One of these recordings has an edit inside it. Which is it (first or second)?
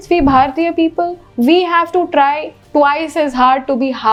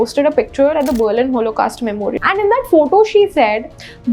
second